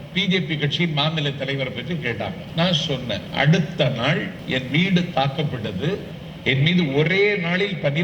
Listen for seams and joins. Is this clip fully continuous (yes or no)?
no